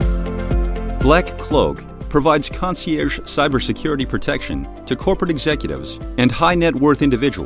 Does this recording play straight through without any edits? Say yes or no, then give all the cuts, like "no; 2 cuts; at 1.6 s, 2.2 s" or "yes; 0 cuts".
no; 1 cut; at 1.0 s